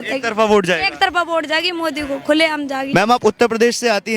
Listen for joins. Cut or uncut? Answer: cut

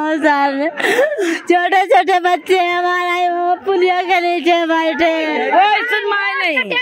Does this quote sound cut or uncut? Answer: cut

